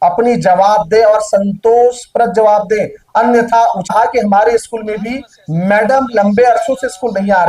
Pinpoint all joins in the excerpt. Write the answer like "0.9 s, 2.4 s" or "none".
3.9 s